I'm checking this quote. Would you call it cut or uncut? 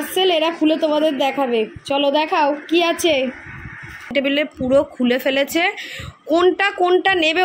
cut